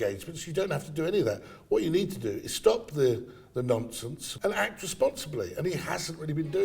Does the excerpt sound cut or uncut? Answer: cut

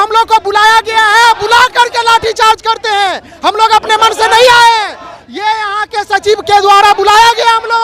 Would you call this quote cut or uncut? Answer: uncut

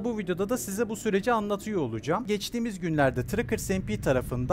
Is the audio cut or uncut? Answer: cut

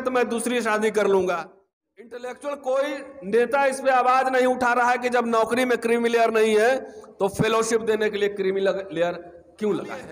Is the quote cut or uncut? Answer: cut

